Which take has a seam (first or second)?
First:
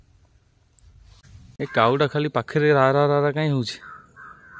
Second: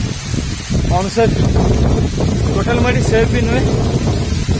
first